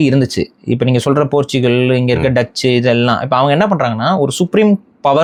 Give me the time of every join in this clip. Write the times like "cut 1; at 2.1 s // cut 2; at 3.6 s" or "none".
none